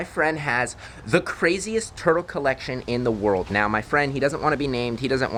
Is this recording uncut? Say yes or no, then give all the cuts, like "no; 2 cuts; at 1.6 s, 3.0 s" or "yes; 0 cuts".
yes; 0 cuts